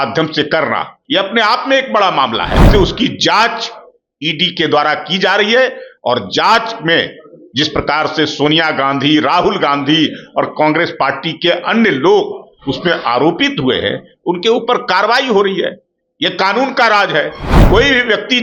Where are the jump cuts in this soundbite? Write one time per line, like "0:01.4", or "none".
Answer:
0:00.9
0:02.7